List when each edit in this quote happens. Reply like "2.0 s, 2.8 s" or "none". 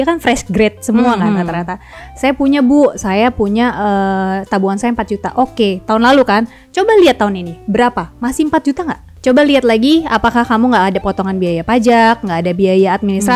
9.1 s